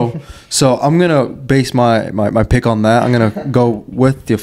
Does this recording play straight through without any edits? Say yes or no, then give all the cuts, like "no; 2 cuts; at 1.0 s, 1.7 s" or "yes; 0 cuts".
yes; 0 cuts